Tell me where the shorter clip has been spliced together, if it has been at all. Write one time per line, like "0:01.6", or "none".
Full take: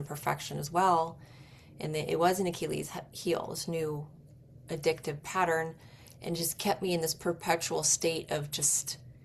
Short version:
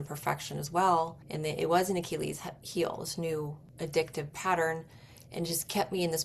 0:01.2
0:03.6